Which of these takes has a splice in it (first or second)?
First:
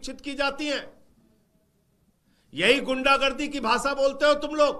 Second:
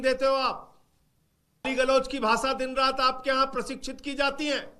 second